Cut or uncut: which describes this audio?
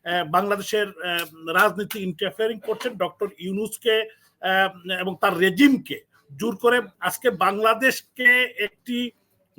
cut